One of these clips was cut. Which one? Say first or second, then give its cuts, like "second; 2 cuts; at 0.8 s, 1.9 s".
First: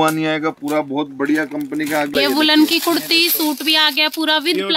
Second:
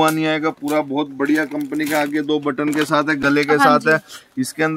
first; 1 cut; at 2.1 s